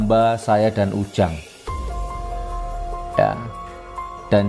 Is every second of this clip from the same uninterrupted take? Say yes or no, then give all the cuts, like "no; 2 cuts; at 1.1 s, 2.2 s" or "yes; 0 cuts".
no; 2 cuts; at 1.4 s, 2.8 s